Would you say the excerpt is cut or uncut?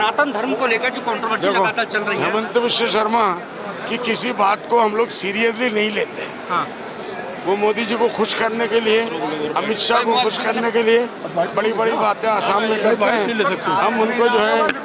uncut